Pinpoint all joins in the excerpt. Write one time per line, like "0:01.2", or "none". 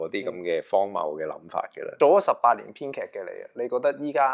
0:01.8